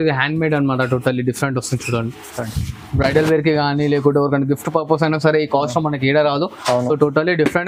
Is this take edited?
no; 0 cuts

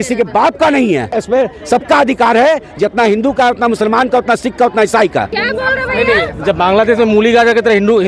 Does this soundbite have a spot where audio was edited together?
yes; 2 cuts; at 1.2 s, 5.3 s

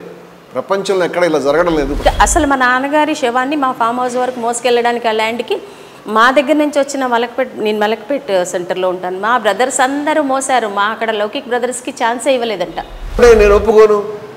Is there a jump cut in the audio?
yes; 2 cuts; at 1.9 s, 13.2 s

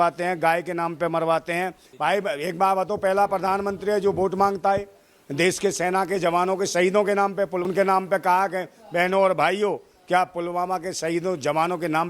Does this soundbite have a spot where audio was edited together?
yes; 2 cuts; at 1.8 s, 7.6 s

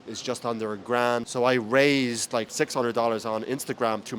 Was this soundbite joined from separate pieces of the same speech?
yes; 2 cuts; at 1.3 s, 2.5 s

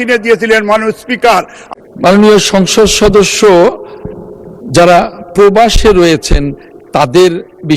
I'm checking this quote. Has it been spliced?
yes; 1 cut; at 1.6 s

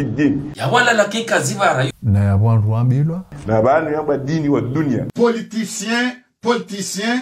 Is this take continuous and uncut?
yes; 0 cuts

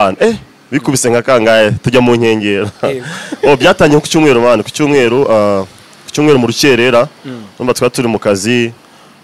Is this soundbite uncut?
yes; 0 cuts

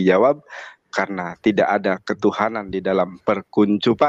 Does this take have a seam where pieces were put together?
no; 0 cuts

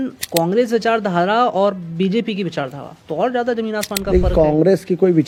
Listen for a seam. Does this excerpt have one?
no; 0 cuts

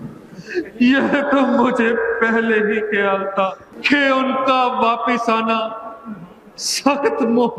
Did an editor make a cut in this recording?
yes; 1 cut; at 3.7 s

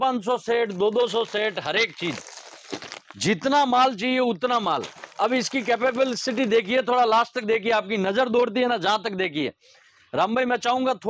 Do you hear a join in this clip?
no; 0 cuts

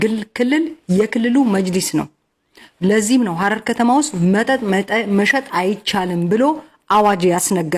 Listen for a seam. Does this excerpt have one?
no; 0 cuts

